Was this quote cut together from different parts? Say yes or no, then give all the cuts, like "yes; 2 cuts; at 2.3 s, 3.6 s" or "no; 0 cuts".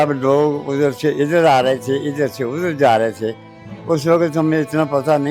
no; 0 cuts